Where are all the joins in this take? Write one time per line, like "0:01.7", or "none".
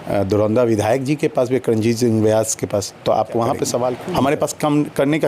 0:04.0